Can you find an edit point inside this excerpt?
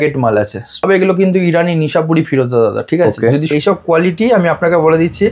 yes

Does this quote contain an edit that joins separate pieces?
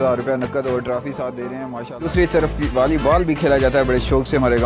yes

